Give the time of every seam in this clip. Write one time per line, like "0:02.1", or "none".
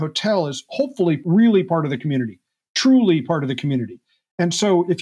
0:01.2